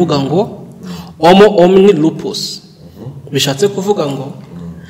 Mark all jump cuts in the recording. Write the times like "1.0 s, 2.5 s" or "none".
none